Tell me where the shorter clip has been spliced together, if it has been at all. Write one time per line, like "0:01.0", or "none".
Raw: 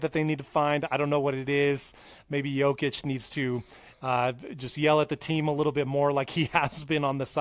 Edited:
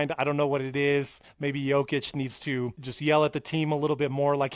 0:01.2
0:02.9